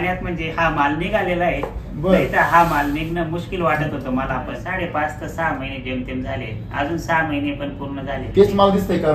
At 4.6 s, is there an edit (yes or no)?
yes